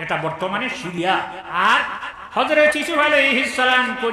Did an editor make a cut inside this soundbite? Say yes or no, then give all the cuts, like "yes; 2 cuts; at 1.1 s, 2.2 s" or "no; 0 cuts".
yes; 1 cut; at 0.9 s